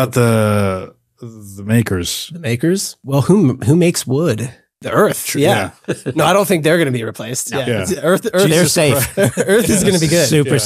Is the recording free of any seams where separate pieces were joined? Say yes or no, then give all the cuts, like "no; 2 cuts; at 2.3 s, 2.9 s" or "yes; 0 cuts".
no; 2 cuts; at 2.9 s, 4.8 s